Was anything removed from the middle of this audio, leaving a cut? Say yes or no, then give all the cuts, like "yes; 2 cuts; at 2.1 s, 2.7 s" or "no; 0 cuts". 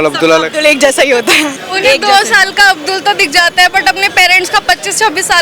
yes; 1 cut; at 1.6 s